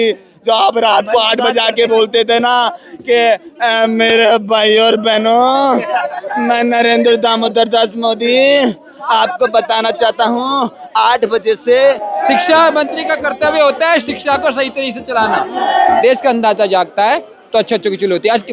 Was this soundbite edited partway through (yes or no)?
yes